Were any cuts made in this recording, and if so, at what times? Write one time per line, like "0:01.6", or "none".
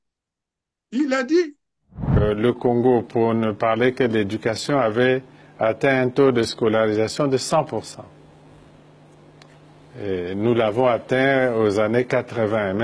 0:02.2